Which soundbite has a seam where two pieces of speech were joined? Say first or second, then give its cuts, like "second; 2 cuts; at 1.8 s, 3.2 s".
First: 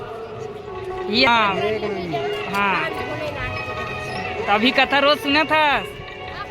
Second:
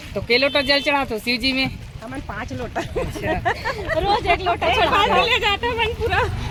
first; 1 cut; at 1.3 s